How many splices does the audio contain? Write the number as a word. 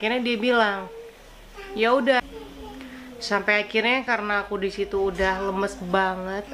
one